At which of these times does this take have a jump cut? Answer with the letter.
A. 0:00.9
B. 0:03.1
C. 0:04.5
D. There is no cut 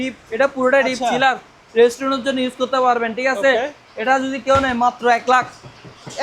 D